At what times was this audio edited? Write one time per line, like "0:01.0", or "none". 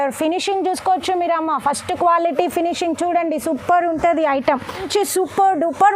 0:04.8